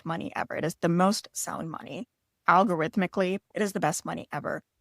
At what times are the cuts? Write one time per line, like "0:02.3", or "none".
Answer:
0:03.5